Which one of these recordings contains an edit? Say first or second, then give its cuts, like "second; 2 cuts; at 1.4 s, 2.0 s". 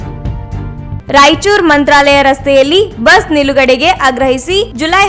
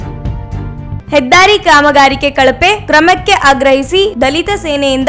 first; 1 cut; at 1.0 s